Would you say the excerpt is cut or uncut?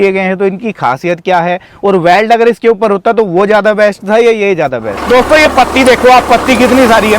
cut